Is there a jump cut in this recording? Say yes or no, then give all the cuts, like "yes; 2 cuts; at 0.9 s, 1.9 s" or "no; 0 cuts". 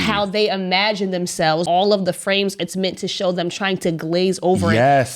yes; 1 cut; at 1.6 s